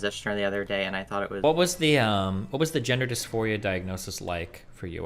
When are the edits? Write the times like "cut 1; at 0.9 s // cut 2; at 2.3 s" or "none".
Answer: cut 1; at 1.4 s